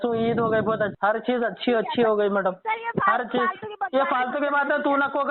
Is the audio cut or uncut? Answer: cut